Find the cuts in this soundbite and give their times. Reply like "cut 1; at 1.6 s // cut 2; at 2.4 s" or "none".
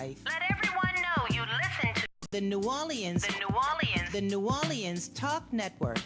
cut 1; at 2.2 s